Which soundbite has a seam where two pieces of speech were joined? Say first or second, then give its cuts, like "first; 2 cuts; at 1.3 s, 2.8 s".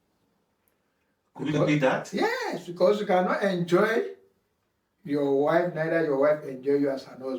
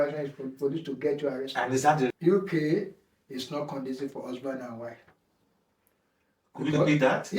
second; 1 cut; at 2.1 s